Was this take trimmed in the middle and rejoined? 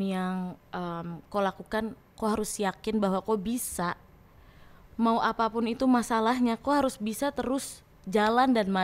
no; 0 cuts

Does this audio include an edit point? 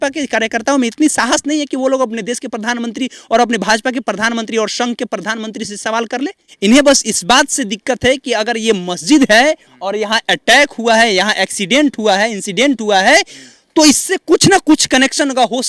yes; 1 cut; at 6.4 s

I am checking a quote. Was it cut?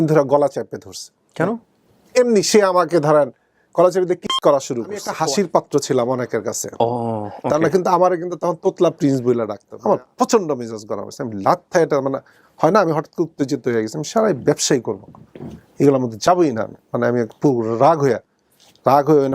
yes; 2 cuts; at 5.1 s, 9.6 s

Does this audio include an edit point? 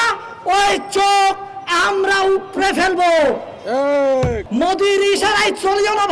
yes; 1 cut; at 4.4 s

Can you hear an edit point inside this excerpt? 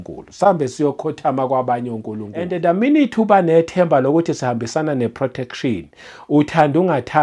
yes; 1 cut; at 2.5 s

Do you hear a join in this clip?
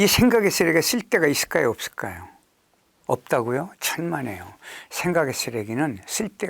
no; 0 cuts

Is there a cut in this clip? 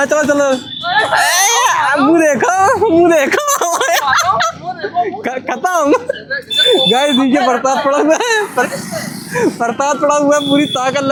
no; 0 cuts

